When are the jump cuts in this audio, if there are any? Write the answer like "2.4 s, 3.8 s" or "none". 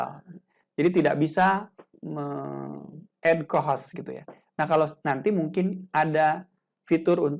none